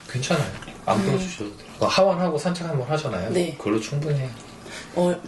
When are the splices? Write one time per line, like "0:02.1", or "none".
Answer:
none